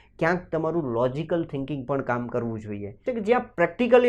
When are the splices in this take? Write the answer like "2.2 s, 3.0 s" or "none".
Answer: 3.1 s